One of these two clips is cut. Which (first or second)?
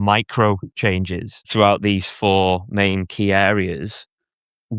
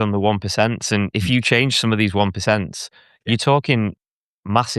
first